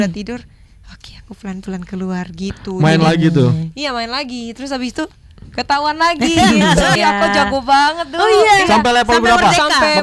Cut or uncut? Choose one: cut